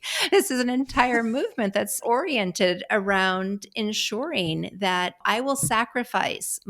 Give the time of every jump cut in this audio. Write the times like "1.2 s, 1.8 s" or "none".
2.0 s, 5.2 s